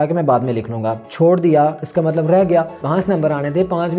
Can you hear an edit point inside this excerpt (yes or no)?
yes